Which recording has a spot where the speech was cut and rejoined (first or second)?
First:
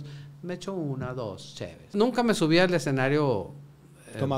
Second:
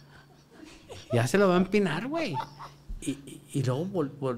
first